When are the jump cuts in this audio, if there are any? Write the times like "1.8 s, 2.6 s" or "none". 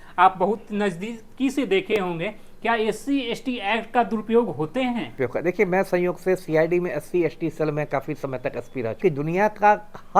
5.1 s, 9.0 s